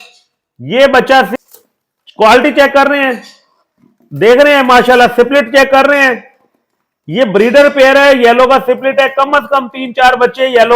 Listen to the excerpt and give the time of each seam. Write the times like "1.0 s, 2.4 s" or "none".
1.3 s